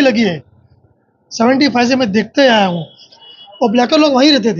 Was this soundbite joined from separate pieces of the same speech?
yes; 1 cut; at 3.2 s

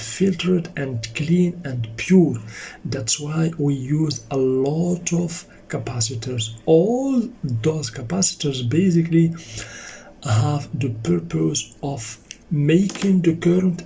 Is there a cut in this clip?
no; 0 cuts

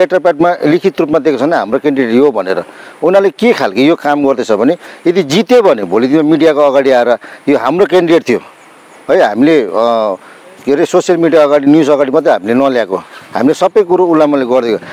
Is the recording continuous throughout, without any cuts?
yes; 0 cuts

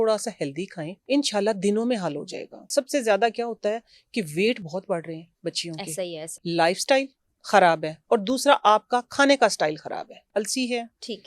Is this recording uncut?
no; 4 cuts; at 0.9 s, 2.6 s, 6.3 s, 10.2 s

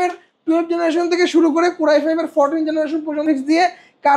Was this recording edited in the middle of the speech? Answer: yes; 1 cut; at 3.2 s

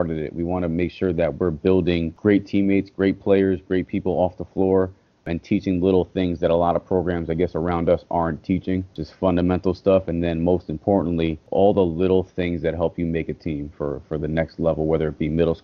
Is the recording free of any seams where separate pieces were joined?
no; 4 cuts; at 2.1 s, 5.2 s, 9.0 s, 11.4 s

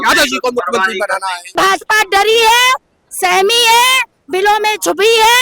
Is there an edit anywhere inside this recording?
yes; 1 cut; at 1.5 s

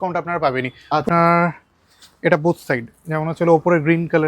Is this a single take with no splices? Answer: no; 1 cut; at 1.0 s

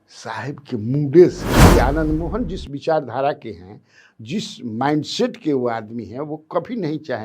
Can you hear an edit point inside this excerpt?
yes; 1 cut; at 1.7 s

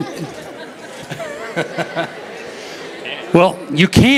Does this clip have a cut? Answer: no; 0 cuts

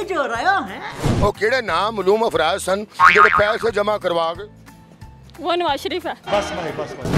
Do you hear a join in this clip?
no; 0 cuts

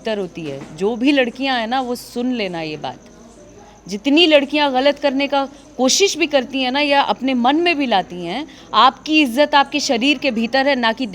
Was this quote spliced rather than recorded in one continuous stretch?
no; 0 cuts

